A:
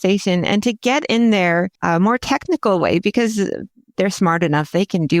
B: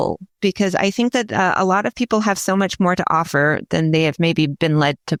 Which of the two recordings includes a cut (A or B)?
A